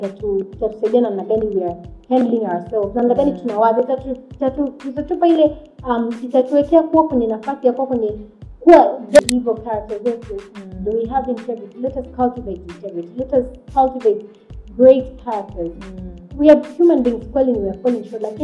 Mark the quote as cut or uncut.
cut